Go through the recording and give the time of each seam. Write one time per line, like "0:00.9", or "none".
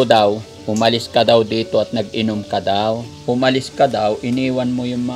0:03.1